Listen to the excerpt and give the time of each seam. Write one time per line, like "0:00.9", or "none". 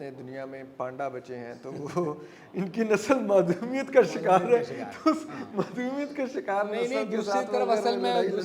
none